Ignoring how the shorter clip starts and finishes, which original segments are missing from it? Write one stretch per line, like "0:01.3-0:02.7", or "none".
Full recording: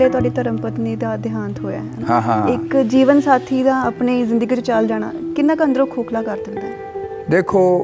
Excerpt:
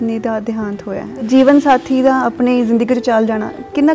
0:02.0-0:02.9